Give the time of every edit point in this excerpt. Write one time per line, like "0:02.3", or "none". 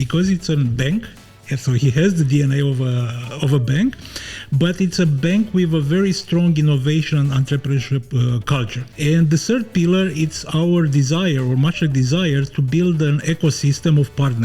0:08.8